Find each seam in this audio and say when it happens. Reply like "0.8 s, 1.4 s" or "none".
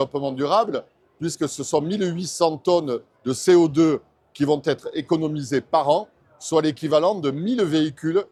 none